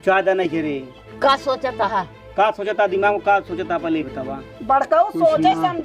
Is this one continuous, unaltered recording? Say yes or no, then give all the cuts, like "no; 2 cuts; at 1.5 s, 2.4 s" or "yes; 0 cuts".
no; 1 cut; at 4.5 s